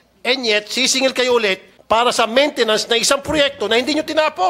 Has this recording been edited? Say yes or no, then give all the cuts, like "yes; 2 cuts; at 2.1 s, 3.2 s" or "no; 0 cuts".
yes; 1 cut; at 1.7 s